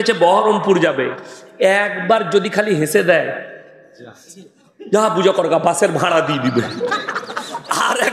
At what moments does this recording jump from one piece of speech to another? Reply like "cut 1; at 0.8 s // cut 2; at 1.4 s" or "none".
none